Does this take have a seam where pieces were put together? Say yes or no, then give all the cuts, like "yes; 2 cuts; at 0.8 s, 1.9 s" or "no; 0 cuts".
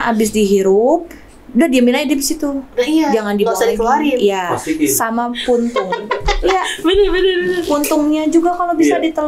no; 0 cuts